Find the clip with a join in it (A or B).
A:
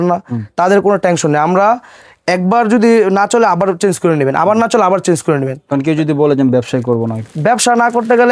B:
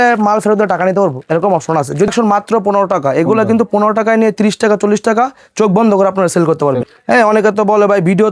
B